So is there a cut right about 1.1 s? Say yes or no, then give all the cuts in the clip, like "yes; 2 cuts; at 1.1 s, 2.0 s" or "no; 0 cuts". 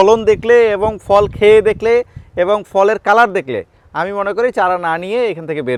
no; 0 cuts